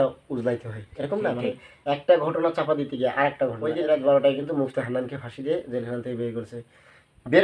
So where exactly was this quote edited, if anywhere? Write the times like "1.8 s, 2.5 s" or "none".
3.6 s